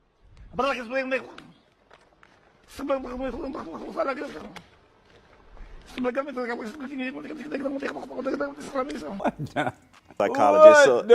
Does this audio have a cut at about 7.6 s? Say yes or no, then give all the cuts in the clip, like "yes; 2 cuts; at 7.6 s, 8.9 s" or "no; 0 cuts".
no; 1 cut; at 9.2 s